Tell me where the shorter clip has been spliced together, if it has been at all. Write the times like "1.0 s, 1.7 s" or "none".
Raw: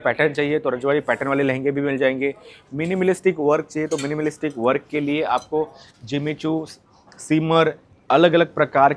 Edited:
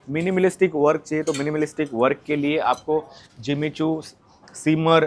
none